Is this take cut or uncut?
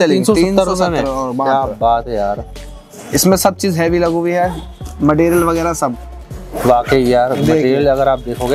uncut